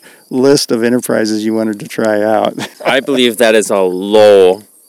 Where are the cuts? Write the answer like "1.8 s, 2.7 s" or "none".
2.8 s

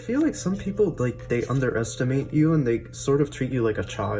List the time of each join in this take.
none

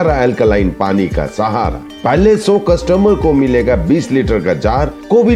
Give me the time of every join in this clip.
none

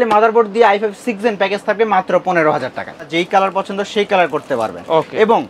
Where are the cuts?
3.1 s

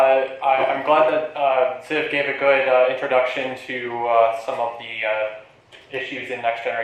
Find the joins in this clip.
none

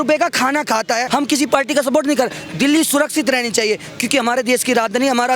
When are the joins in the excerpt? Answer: 1.0 s

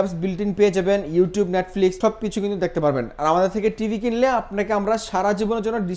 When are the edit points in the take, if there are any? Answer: none

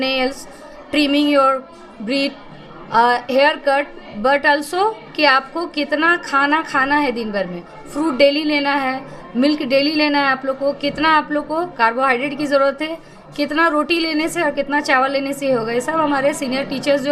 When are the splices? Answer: none

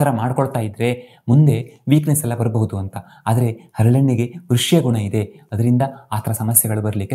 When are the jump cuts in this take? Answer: none

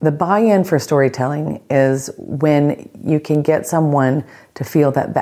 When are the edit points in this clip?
none

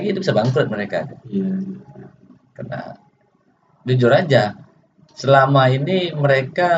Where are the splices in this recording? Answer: none

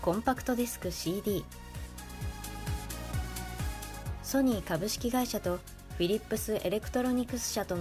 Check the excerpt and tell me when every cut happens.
none

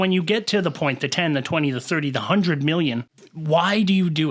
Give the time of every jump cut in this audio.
3.1 s

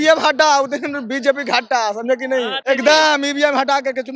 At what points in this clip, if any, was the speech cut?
2.6 s

